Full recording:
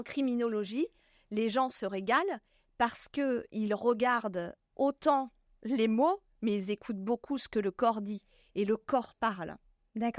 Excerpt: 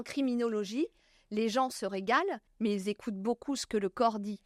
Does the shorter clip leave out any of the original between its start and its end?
yes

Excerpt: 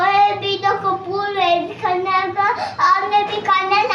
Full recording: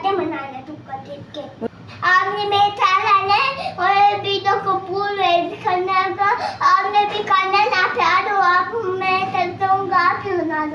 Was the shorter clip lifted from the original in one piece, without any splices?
yes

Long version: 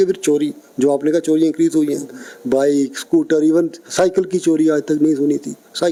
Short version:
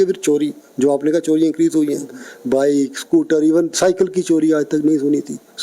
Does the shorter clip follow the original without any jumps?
no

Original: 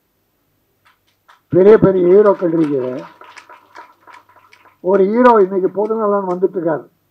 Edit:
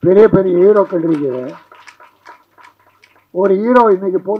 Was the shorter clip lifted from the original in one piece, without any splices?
yes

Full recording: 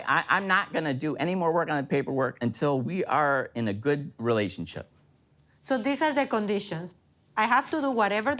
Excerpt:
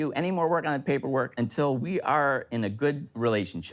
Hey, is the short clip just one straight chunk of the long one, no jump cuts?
yes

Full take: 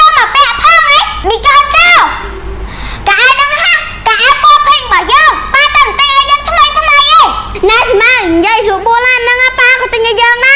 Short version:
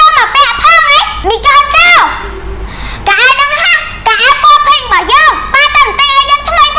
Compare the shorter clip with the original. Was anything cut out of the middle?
no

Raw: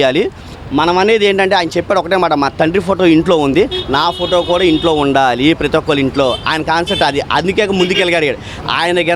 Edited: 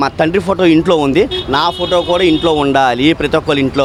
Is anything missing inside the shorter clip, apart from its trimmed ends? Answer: no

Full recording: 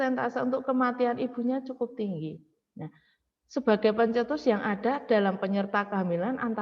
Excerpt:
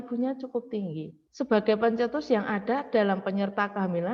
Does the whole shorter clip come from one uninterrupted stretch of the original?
no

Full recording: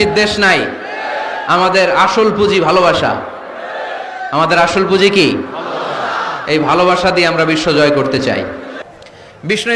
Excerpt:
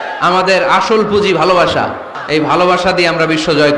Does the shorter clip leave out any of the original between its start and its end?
yes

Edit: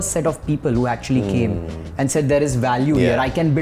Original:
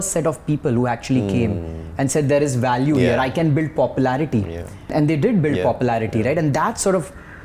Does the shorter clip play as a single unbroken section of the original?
yes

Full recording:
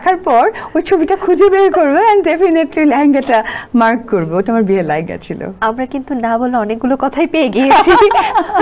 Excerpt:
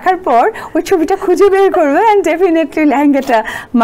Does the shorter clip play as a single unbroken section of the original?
yes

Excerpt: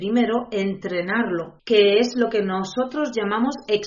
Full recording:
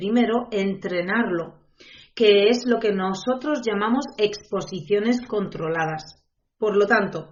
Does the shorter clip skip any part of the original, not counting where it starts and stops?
yes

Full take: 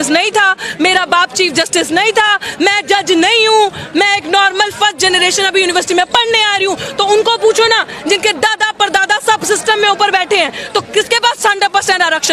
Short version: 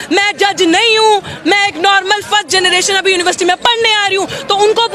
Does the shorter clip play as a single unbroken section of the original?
yes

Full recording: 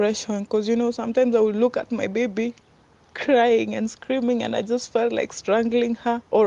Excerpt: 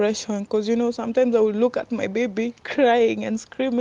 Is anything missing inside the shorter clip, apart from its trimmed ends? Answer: yes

